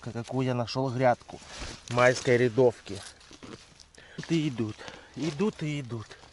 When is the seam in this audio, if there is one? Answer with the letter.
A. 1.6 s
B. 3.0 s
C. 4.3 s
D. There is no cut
C